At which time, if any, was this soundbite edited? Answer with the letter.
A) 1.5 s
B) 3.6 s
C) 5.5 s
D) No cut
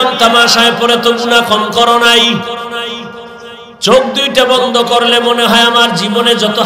B